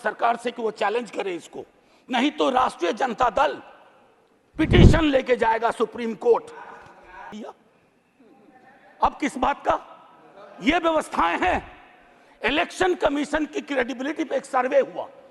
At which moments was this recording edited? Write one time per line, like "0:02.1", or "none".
0:07.3